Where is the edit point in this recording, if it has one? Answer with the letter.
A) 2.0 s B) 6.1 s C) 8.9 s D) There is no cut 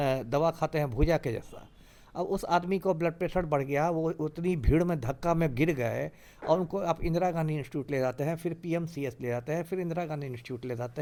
D